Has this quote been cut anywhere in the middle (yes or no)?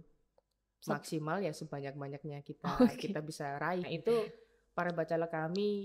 yes